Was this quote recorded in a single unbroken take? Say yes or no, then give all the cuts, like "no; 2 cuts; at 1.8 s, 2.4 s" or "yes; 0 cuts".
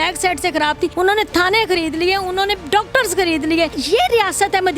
no; 2 cuts; at 0.9 s, 3.8 s